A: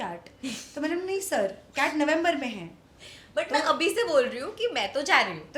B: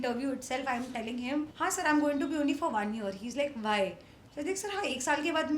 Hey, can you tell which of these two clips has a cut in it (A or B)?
B